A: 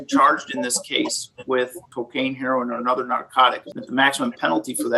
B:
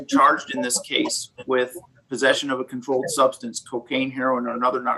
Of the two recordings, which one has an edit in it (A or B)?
A